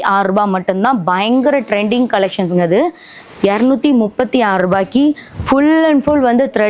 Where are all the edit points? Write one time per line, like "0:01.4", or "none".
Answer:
none

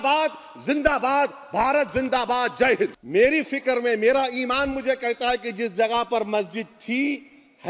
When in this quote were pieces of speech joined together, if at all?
0:03.0

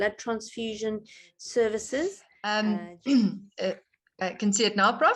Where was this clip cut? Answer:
0:02.3

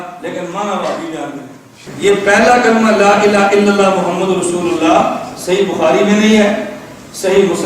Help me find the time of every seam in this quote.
0:01.9

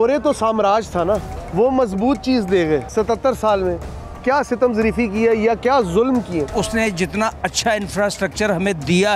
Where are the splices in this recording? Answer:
0:01.4
0:02.9
0:06.5

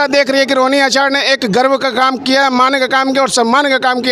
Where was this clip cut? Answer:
none

